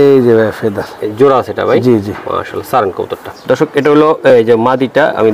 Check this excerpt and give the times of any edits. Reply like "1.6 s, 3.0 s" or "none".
none